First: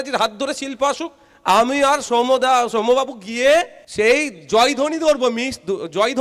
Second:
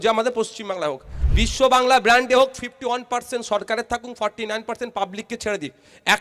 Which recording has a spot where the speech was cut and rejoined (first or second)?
second